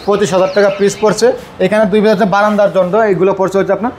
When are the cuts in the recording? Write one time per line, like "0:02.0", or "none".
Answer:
none